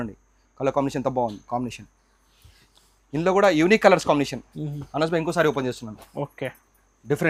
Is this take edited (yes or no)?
no